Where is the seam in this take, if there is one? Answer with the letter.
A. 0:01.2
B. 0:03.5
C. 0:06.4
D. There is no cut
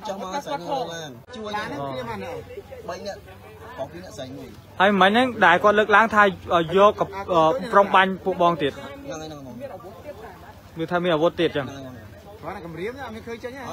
A